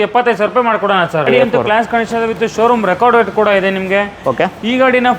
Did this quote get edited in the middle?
yes; 1 cut; at 1.2 s

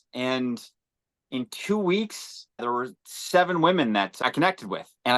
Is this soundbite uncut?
no; 1 cut; at 1.2 s

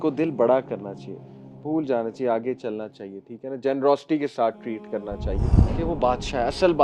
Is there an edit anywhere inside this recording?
yes; 1 cut; at 5.6 s

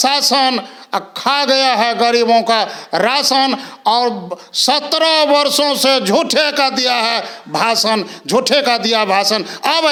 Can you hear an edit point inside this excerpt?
no; 0 cuts

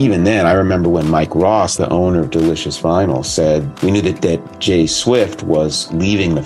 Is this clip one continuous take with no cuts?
yes; 0 cuts

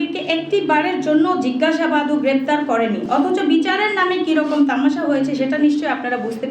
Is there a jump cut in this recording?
no; 0 cuts

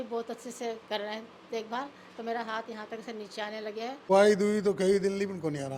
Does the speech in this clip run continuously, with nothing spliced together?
no; 1 cut; at 4.1 s

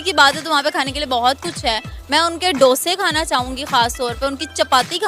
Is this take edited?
no; 0 cuts

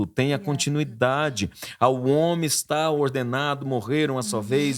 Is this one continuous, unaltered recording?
yes; 0 cuts

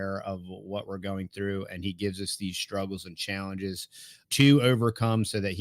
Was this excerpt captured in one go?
no; 1 cut; at 4.3 s

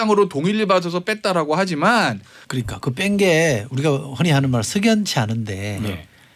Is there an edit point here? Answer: yes; 1 cut; at 2.4 s

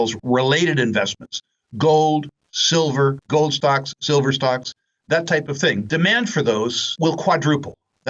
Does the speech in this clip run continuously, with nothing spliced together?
no; 3 cuts; at 3.2 s, 5.9 s, 6.8 s

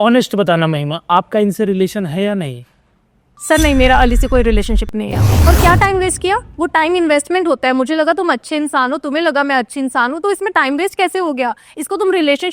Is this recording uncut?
no; 1 cut; at 5.2 s

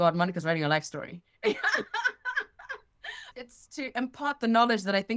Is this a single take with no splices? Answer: yes; 0 cuts

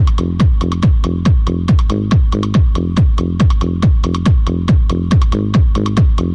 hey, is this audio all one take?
yes; 0 cuts

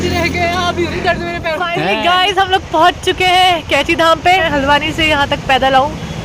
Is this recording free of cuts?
no; 2 cuts; at 1.7 s, 4.4 s

